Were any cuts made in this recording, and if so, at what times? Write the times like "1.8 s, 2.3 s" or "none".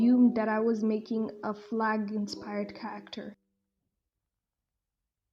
none